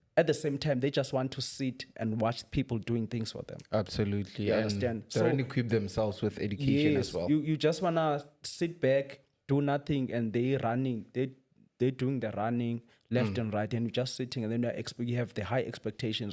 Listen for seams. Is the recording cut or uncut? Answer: uncut